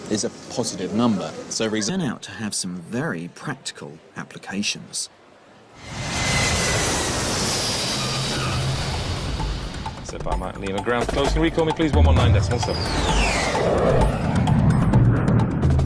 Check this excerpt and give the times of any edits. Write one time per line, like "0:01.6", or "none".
none